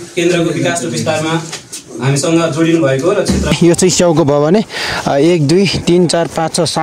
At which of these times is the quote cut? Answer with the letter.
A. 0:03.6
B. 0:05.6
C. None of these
A